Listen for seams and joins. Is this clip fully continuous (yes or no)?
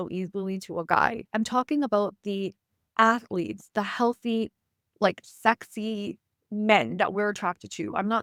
yes